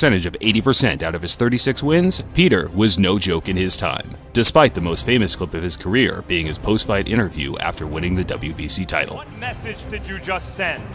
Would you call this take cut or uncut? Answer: uncut